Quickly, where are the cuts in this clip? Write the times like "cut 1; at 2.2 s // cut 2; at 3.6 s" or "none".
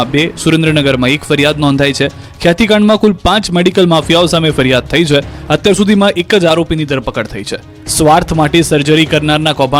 none